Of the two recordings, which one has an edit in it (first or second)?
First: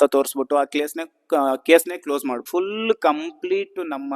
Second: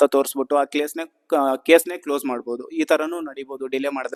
first